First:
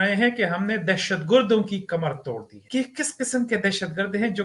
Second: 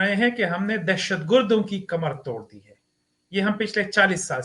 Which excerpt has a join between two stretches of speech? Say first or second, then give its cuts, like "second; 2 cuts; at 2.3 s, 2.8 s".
first; 1 cut; at 2.5 s